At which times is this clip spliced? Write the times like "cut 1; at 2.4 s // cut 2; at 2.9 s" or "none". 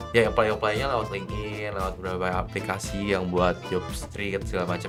none